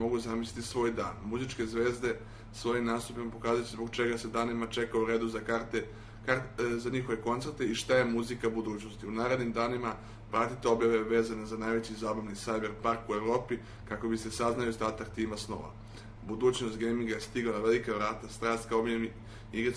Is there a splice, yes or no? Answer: yes